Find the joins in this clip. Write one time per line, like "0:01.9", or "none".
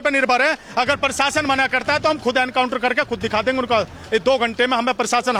none